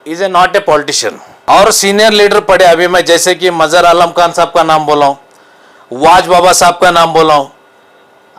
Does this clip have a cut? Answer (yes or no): yes